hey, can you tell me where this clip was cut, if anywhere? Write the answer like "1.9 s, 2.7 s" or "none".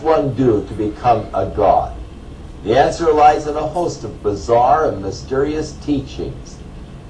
3.9 s